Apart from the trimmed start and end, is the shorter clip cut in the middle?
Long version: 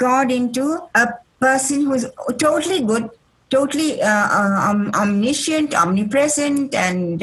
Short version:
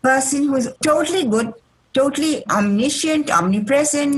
yes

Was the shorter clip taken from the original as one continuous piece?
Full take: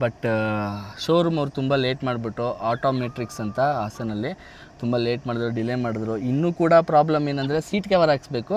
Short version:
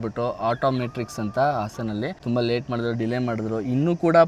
no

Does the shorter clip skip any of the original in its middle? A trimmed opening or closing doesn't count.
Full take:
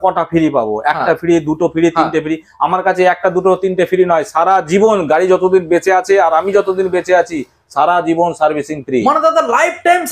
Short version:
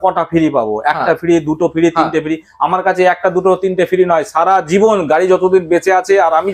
no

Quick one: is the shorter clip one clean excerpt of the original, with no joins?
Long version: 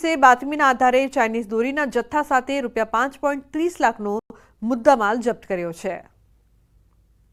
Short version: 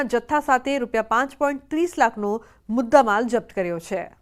no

